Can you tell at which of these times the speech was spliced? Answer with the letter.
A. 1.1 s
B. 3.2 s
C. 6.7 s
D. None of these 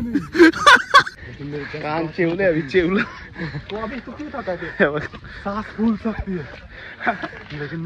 A